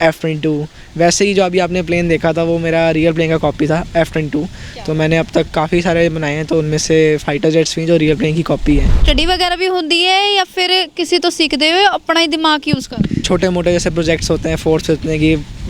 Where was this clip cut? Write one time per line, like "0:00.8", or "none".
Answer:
0:09.0
0:13.3